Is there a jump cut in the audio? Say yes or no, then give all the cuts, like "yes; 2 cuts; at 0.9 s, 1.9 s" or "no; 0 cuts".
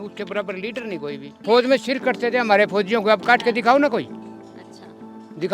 no; 0 cuts